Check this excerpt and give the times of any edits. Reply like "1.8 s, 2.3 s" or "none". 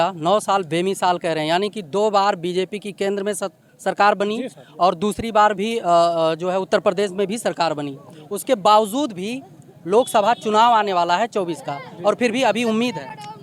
none